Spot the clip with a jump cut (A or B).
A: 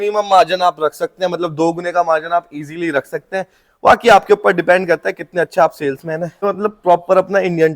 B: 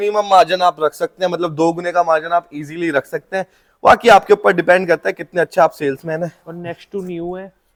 A